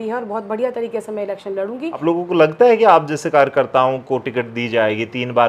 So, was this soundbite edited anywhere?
yes; 1 cut; at 2.0 s

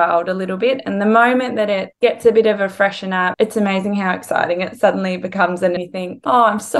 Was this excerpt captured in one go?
no; 2 cuts; at 3.3 s, 5.8 s

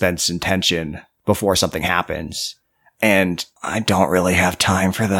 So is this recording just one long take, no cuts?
no; 2 cuts; at 1.0 s, 3.5 s

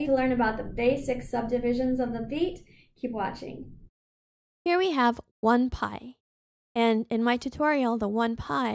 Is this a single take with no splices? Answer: no; 1 cut; at 5.8 s

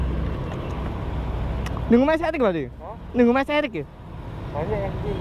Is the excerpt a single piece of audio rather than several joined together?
yes; 0 cuts

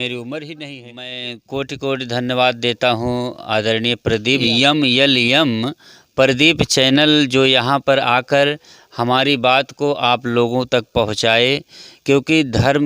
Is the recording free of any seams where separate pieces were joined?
no; 2 cuts; at 1.1 s, 4.5 s

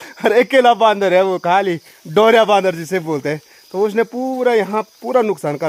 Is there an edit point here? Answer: no; 0 cuts

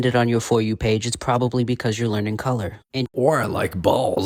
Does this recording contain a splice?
no; 0 cuts

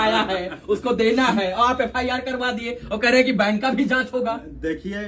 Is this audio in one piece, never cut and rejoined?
yes; 0 cuts

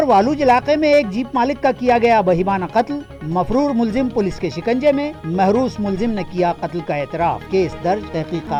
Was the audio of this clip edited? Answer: no; 0 cuts

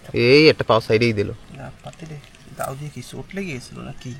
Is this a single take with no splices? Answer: yes; 0 cuts

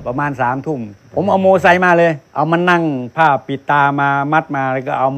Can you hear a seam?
yes; 2 cuts; at 1.0 s, 2.2 s

